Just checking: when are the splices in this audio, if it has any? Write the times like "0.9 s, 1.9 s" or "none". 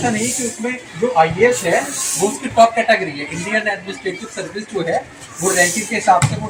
none